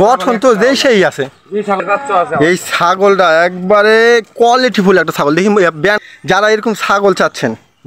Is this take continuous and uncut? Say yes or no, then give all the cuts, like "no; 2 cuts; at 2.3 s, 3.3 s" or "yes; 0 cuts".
no; 2 cuts; at 1.8 s, 6.0 s